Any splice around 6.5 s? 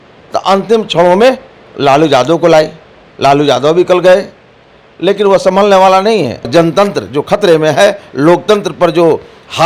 yes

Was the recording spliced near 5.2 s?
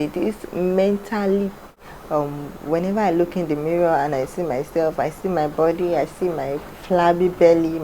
no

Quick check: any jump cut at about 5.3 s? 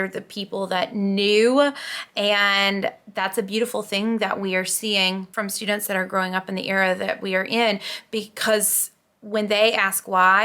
yes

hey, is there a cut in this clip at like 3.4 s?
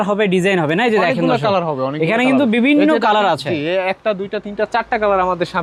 no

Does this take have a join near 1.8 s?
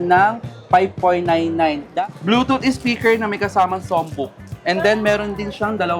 yes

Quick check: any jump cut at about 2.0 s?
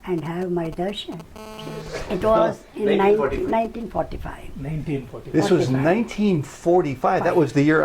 yes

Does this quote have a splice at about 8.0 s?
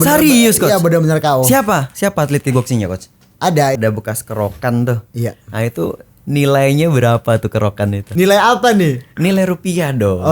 yes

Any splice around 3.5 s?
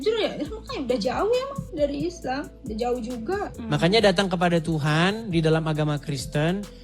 yes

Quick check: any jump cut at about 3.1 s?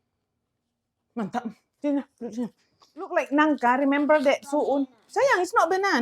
yes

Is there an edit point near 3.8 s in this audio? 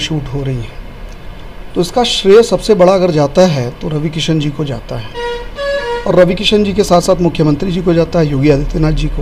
no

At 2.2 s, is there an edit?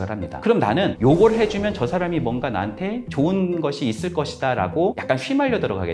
no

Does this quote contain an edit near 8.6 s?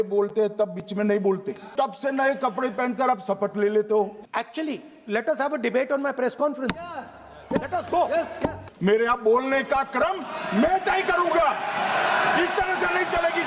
yes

